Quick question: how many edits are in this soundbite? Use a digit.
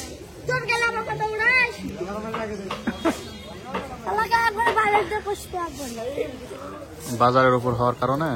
1